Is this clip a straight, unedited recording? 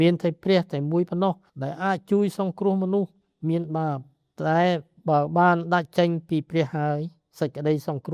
yes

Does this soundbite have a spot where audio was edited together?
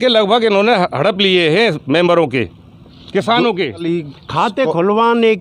yes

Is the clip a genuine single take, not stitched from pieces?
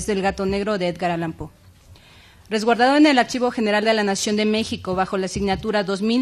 no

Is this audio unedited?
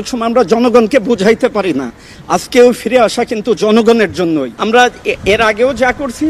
no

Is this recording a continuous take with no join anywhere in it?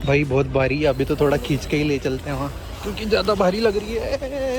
yes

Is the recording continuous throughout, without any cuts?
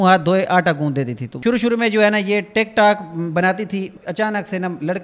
no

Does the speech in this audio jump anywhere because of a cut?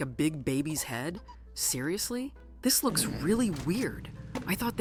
no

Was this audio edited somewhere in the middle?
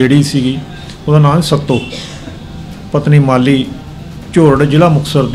no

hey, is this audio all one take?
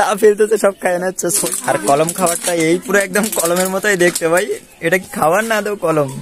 no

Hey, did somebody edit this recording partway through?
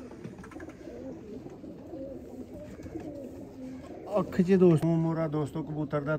yes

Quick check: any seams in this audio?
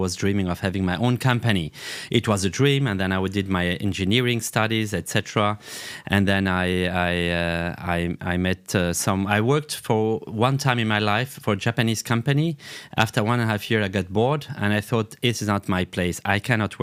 no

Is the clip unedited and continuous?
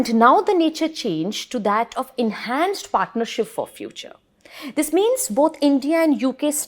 yes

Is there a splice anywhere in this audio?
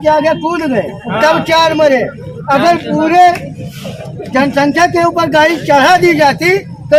no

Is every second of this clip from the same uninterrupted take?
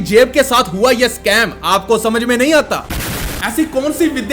yes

